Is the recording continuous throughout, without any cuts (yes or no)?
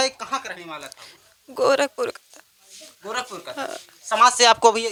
yes